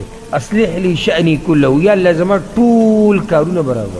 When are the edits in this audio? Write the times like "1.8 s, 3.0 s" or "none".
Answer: none